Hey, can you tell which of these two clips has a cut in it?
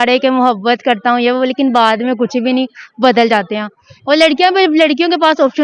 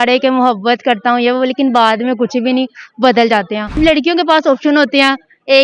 second; 1 cut; at 3.8 s

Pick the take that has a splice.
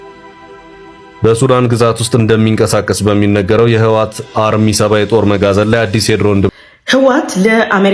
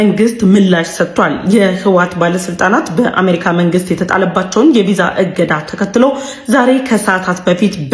first; 1 cut; at 6.5 s

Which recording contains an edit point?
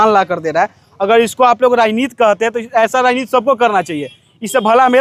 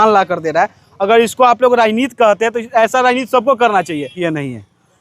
second; 1 cut; at 4.1 s

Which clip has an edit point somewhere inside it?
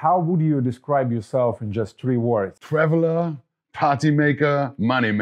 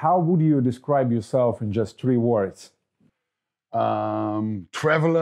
first; 1 cut; at 2.6 s

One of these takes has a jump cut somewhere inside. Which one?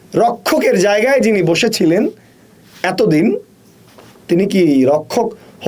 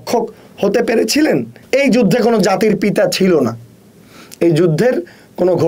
second; 1 cut; at 1.6 s

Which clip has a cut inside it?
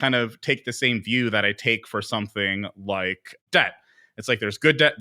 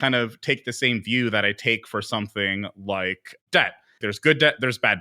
second; 1 cut; at 4.0 s

